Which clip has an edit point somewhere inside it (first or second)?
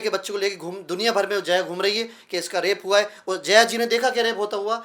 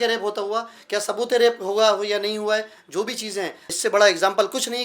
second